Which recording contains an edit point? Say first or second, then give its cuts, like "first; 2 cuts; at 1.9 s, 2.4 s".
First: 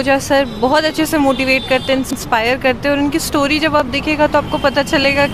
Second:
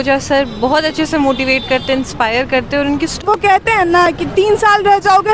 second; 2 cuts; at 2.1 s, 3.2 s